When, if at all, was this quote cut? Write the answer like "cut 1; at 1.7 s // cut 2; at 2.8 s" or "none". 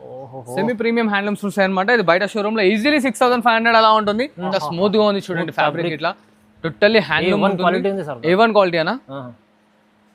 cut 1; at 4.5 s